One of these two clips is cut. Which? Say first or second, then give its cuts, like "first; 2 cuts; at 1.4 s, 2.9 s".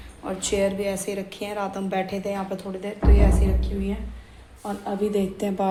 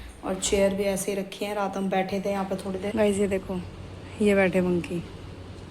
second; 1 cut; at 2.9 s